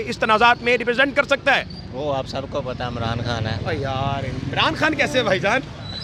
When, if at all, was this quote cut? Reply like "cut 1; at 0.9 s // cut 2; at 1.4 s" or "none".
none